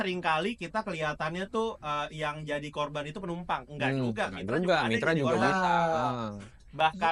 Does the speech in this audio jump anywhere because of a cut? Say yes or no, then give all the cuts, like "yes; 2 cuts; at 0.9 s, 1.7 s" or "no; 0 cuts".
no; 0 cuts